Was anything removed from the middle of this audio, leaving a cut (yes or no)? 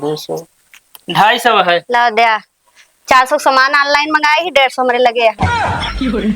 yes